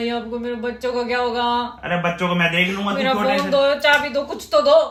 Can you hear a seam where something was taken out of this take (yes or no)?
no